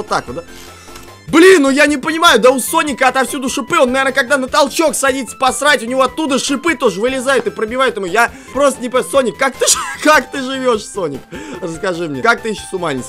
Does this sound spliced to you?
yes; 2 cuts; at 8.4 s, 12.2 s

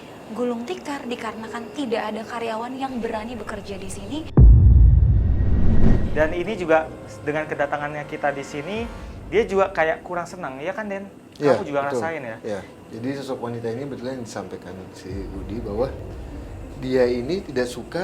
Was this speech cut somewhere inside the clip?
yes; 1 cut; at 6.1 s

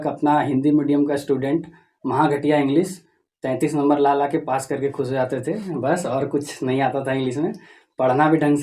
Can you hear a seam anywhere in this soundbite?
no; 0 cuts

